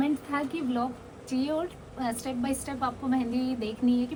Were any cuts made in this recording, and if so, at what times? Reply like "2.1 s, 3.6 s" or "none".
none